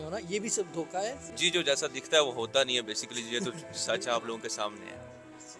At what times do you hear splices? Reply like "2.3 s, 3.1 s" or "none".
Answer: 1.3 s